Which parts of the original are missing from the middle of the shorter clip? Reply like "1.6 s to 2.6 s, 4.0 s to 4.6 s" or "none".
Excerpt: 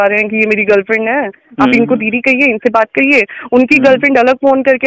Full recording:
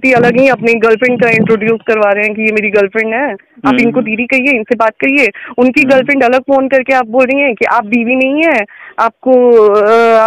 none